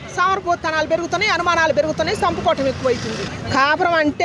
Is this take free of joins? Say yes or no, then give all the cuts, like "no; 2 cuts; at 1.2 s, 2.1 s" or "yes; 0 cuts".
no; 1 cut; at 3.3 s